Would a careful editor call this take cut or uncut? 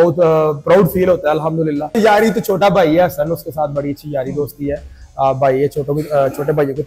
cut